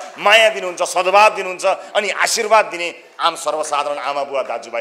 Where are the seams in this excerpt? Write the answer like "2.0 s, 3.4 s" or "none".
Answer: none